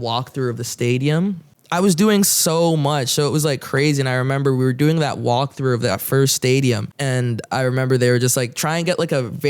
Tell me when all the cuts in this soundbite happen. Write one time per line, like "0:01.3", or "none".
0:01.5
0:06.9